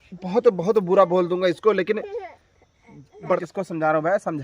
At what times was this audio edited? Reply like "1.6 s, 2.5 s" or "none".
3.4 s